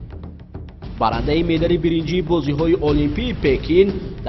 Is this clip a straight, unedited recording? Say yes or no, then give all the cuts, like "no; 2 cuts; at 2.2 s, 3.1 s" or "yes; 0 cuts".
no; 1 cut; at 0.9 s